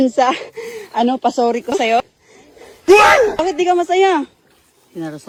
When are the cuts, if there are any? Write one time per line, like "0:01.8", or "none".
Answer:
none